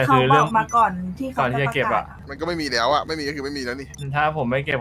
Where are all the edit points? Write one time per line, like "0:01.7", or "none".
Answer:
0:02.2
0:03.9